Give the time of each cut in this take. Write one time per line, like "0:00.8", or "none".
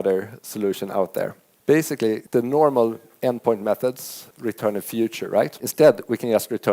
0:01.5
0:02.2
0:04.2
0:05.6